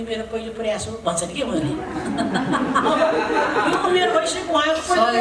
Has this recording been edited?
no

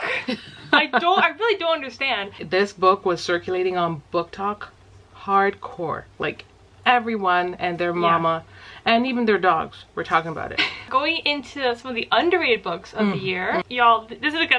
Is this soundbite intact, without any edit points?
no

